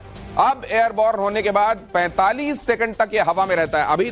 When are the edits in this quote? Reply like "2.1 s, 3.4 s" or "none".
2.9 s